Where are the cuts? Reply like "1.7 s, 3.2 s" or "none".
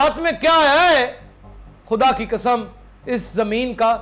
none